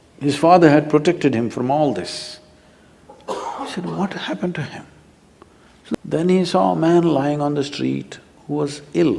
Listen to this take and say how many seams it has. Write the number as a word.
one